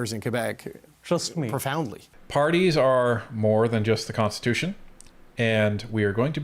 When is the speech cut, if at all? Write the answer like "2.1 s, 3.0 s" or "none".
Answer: 2.0 s